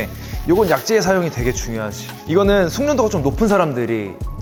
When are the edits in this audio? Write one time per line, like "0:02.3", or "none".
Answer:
none